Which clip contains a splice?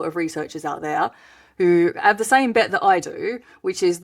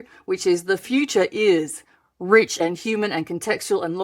second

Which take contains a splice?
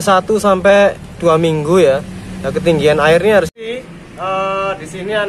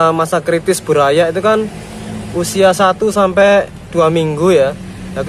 first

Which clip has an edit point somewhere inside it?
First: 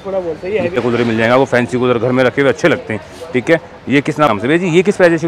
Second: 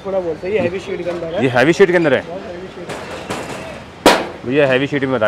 first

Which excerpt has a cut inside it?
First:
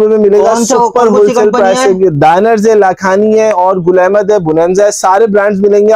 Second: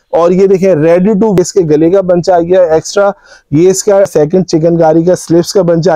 second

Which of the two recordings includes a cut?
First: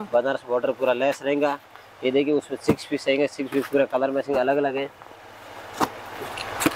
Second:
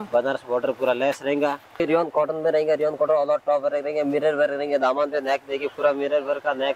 second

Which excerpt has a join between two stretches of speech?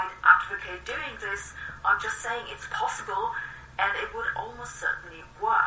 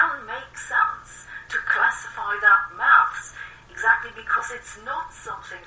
second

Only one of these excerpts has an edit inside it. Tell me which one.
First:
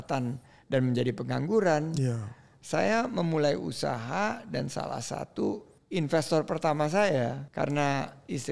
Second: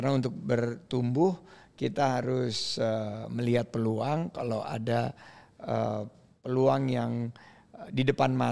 first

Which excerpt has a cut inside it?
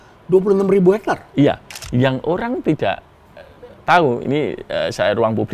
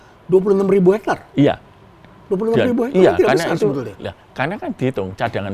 first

